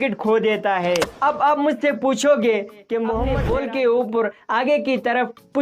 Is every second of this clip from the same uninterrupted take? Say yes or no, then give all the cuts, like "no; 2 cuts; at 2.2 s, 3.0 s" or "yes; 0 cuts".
no; 1 cut; at 3.3 s